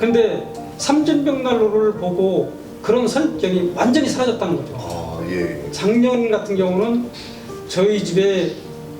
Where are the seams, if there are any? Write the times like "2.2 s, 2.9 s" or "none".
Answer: 5.6 s